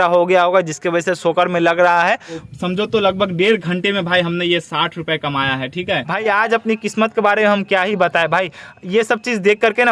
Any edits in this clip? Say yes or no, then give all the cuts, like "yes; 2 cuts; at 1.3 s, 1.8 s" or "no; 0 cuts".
yes; 2 cuts; at 2.4 s, 6.1 s